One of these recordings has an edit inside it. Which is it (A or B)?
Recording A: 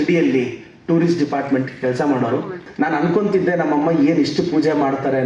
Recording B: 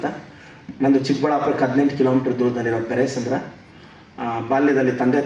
A